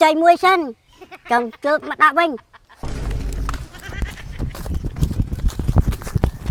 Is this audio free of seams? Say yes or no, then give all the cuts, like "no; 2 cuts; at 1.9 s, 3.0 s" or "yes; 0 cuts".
yes; 0 cuts